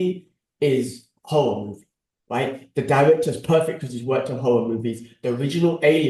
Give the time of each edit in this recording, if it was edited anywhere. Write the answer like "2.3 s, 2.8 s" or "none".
none